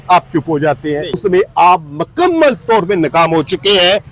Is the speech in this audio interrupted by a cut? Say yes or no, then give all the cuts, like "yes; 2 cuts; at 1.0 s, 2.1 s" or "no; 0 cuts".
yes; 1 cut; at 1.2 s